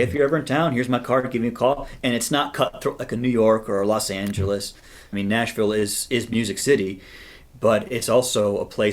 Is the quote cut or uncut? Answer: cut